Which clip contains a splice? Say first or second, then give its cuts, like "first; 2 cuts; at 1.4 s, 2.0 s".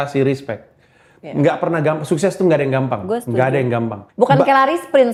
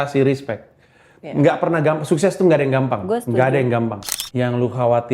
second; 1 cut; at 4.0 s